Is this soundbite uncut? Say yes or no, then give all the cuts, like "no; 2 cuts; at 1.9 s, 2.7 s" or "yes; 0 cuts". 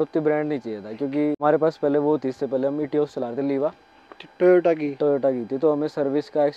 yes; 0 cuts